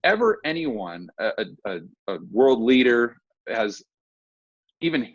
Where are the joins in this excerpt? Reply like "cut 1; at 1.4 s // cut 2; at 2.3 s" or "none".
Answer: none